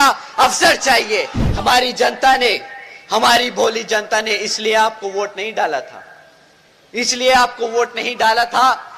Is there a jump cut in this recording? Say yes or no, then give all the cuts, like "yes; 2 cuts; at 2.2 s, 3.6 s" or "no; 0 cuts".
yes; 1 cut; at 1.4 s